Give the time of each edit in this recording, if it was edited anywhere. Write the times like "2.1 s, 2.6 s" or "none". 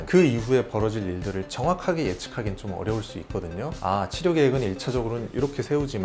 3.8 s